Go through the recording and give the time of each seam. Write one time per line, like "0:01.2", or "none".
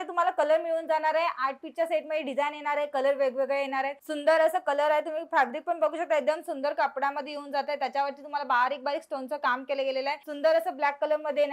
0:04.0
0:10.3